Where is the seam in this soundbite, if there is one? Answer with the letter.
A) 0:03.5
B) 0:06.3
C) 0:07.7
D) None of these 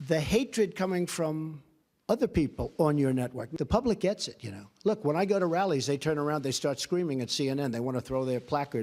A